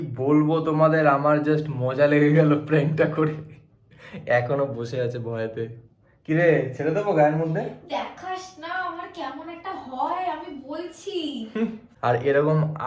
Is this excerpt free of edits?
no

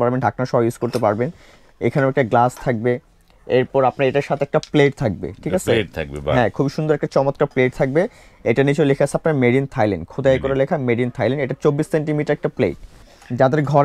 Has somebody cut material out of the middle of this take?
yes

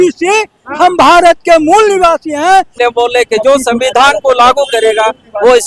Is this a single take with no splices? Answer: no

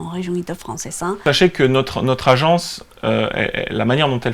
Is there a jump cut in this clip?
yes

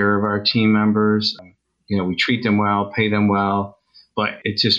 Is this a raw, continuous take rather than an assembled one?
yes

